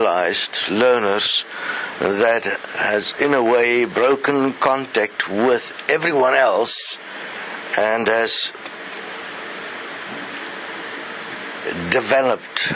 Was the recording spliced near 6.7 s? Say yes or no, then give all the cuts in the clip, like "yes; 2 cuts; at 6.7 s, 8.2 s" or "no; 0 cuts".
yes; 1 cut; at 6.7 s